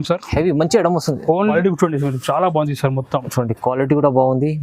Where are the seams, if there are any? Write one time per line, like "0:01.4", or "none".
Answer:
0:01.5